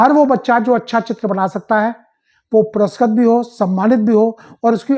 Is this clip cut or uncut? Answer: uncut